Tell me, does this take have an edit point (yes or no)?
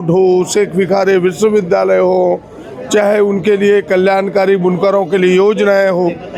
no